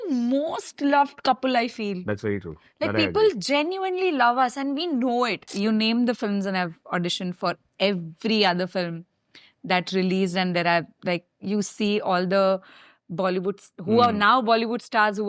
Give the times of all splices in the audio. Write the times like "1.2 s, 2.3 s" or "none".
5.5 s